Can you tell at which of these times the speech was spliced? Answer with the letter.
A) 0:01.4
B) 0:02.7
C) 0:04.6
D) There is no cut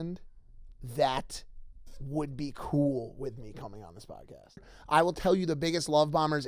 C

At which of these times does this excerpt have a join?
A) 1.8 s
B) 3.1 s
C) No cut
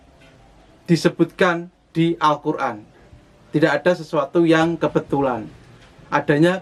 C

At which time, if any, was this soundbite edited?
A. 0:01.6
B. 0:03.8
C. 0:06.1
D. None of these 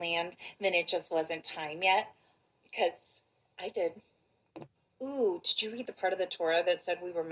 C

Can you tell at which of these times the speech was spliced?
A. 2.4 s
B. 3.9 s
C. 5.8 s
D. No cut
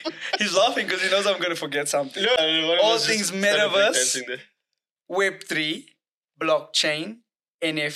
A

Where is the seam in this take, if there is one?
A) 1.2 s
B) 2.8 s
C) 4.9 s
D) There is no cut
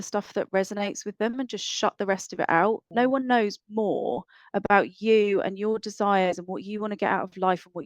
B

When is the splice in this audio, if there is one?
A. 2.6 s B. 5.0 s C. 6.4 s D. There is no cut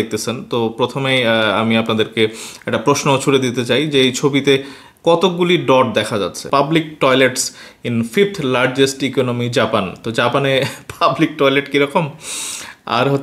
C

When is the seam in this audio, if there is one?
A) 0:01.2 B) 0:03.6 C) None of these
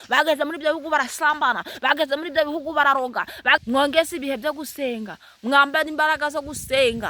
B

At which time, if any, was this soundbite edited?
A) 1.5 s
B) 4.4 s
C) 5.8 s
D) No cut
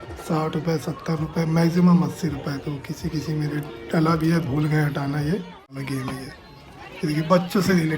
C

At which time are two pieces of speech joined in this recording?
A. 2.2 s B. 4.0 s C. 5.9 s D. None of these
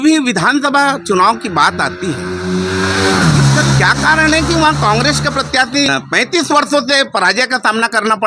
C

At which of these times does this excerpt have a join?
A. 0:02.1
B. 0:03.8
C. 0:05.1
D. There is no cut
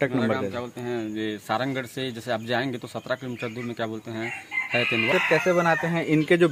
C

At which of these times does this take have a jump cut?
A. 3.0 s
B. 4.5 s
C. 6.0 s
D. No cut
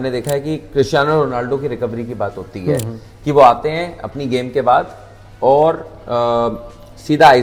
D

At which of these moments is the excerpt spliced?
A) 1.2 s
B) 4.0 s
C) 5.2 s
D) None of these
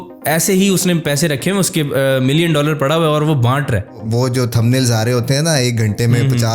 B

